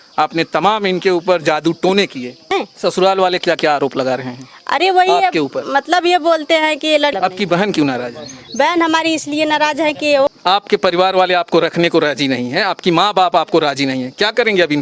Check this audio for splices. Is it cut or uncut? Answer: cut